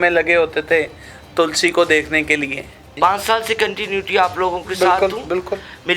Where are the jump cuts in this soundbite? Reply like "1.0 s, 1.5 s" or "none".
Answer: 3.0 s